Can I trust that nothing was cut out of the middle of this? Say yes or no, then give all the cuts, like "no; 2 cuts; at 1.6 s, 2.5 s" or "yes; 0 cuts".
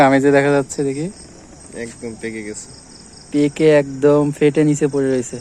yes; 0 cuts